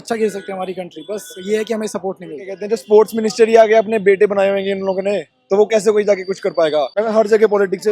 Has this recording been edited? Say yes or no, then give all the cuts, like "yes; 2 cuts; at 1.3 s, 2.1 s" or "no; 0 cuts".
yes; 2 cuts; at 2.6 s, 6.9 s